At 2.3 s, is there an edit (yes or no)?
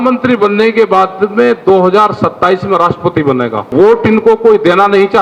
no